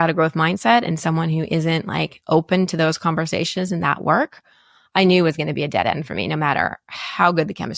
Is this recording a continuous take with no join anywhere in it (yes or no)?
yes